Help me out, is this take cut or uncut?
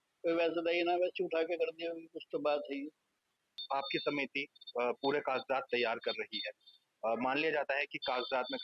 cut